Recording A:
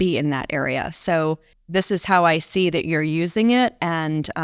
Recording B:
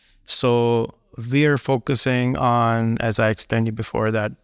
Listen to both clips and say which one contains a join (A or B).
A